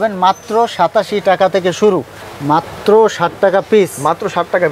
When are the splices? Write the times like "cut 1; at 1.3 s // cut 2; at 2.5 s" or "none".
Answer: cut 1; at 2.2 s